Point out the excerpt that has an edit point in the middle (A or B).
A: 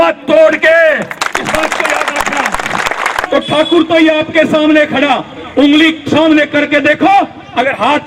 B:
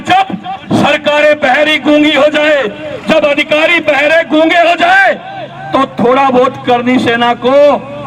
A